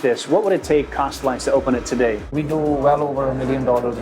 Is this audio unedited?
no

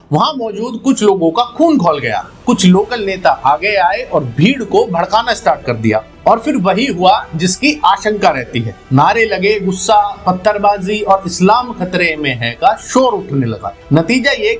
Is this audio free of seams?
yes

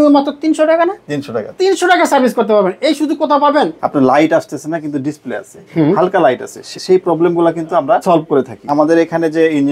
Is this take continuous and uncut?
no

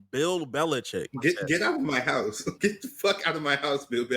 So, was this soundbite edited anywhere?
yes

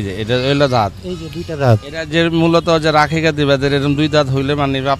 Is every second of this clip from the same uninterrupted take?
yes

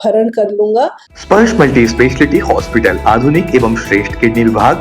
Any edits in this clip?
yes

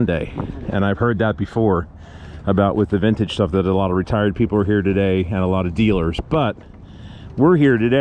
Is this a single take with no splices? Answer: yes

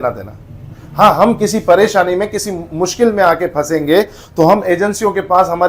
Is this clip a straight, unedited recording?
yes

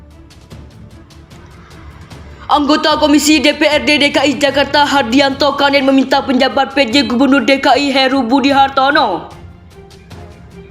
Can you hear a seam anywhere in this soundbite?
yes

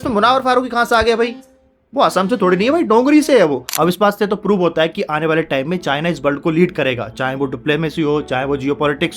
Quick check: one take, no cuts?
no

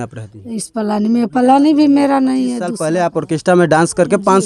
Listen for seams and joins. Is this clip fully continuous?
no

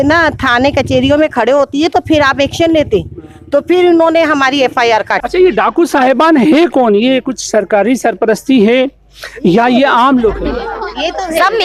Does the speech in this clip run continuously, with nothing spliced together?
yes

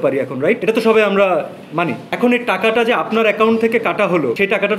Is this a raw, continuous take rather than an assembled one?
yes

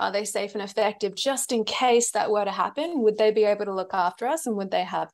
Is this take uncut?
yes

